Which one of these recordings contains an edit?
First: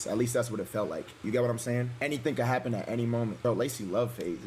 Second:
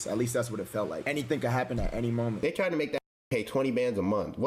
second; 2 cuts; at 1.0 s, 2.4 s

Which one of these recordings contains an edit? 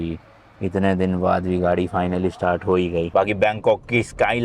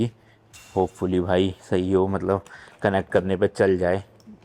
first; 1 cut; at 3.1 s

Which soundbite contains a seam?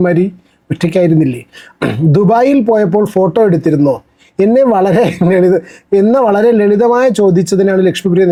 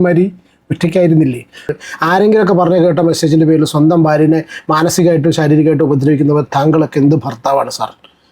second; 1 cut; at 1.8 s

